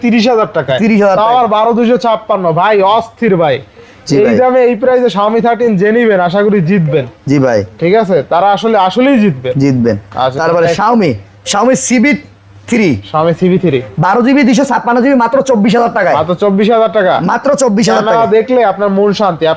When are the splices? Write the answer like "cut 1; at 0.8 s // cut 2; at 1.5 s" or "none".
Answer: none